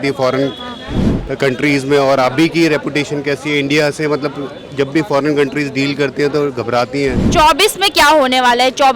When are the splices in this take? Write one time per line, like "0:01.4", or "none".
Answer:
0:07.2